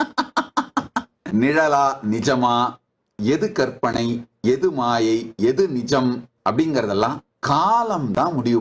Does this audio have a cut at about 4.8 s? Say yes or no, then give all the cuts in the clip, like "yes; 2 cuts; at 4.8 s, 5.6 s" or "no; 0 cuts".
no; 3 cuts; at 1.2 s, 6.3 s, 7.3 s